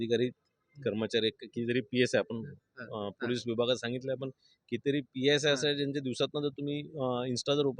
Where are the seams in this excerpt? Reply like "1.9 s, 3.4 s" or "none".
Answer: none